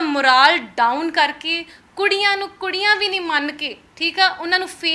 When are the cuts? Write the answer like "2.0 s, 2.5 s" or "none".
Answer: none